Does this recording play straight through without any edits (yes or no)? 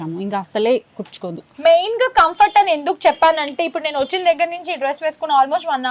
yes